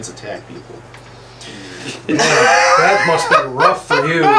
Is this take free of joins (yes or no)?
yes